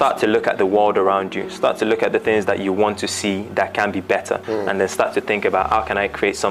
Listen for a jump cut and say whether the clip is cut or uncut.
uncut